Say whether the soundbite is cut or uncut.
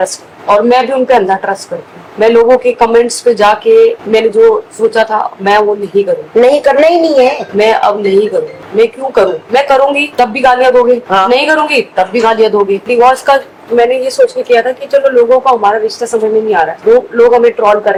uncut